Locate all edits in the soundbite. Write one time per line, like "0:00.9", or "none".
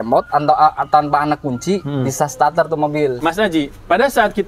0:03.2